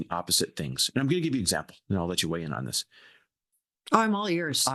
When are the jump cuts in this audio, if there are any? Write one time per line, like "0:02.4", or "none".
none